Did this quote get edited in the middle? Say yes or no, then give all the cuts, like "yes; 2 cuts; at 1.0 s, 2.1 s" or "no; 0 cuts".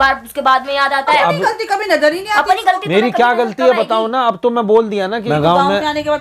yes; 1 cut; at 5.1 s